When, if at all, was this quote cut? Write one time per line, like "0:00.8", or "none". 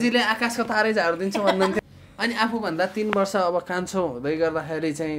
0:01.8